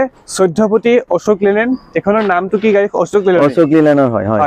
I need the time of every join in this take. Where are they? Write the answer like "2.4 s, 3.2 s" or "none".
none